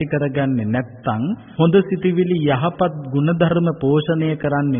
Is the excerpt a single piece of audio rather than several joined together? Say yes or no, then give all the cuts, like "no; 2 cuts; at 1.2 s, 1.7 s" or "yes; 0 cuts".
yes; 0 cuts